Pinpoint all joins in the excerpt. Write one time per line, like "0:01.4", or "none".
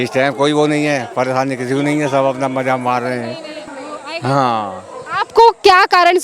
0:03.6

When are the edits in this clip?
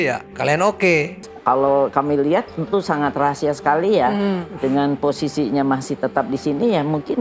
0:01.2

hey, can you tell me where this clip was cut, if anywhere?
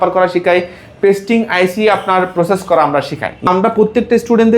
0:03.5

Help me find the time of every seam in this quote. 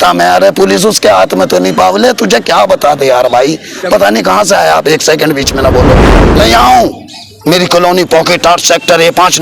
0:06.1

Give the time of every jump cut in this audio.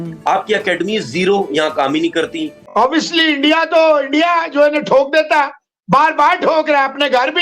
0:02.6

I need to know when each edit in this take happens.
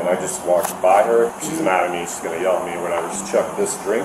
0:01.3
0:03.2

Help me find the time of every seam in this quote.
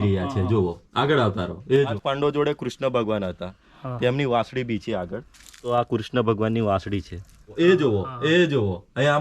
0:01.9
0:05.7
0:07.8

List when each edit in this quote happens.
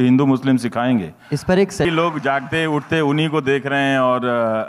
0:01.8

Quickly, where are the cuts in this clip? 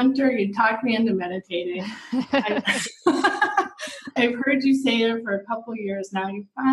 0:04.1

